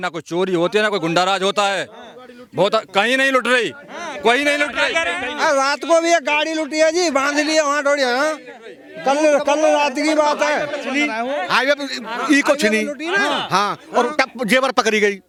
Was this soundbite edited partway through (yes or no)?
no